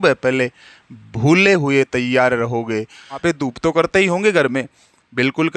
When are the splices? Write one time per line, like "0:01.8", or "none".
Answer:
0:03.2